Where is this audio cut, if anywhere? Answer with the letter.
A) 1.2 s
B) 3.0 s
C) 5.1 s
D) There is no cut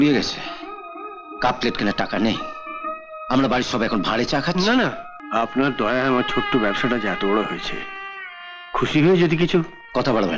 C